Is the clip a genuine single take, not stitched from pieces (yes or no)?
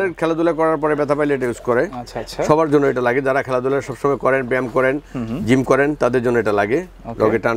yes